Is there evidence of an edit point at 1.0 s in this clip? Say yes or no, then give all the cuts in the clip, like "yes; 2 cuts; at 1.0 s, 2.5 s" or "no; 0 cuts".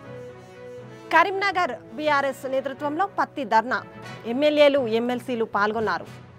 yes; 1 cut; at 1.0 s